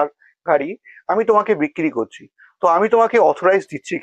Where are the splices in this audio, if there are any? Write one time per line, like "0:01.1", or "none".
none